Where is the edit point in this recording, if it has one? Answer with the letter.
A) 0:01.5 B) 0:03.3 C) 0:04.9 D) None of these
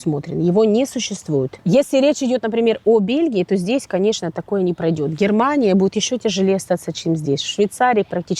A